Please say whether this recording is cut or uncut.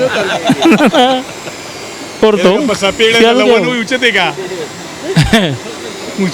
cut